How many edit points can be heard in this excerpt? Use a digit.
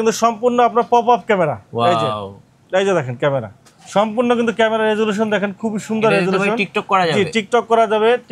0